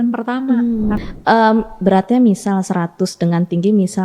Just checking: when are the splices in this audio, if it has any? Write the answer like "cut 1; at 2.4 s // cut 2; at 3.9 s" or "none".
cut 1; at 1.0 s